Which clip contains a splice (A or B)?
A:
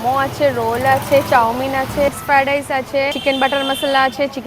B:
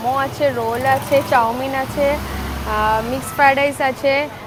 A